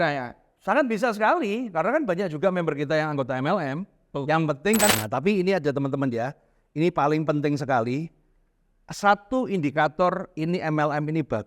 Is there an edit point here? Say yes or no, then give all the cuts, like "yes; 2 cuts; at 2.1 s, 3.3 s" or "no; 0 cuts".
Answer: yes; 1 cut; at 4.9 s